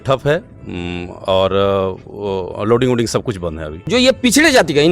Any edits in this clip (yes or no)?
yes